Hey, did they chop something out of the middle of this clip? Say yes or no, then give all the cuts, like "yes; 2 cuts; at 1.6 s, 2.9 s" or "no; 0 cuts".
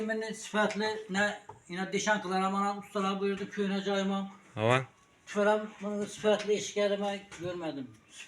no; 0 cuts